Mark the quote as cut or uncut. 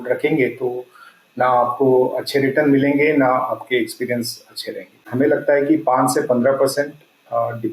cut